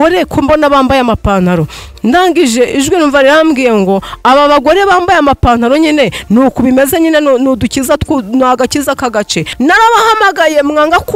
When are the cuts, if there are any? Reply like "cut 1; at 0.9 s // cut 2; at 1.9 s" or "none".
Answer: cut 1; at 9.5 s